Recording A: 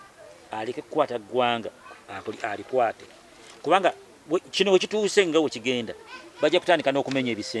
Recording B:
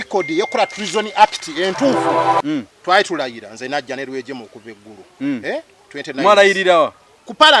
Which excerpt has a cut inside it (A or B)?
B